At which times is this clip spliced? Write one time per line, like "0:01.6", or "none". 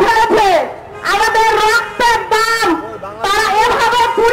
none